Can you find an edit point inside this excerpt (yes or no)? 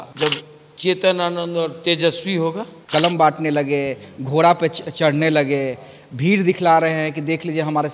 yes